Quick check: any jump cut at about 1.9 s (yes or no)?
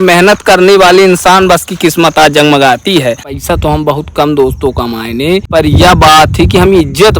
no